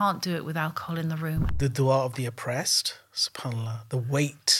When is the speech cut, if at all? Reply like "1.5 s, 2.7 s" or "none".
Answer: 1.5 s